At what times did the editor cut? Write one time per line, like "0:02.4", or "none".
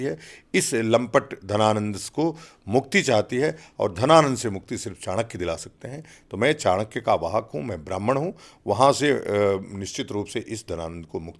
none